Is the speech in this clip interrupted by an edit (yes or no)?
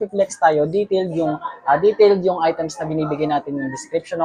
no